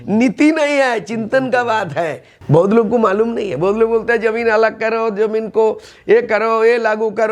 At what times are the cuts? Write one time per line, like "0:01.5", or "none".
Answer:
0:02.3